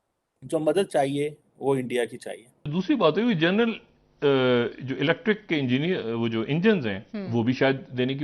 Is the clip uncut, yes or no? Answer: no